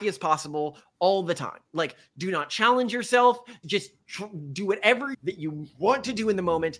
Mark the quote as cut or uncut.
cut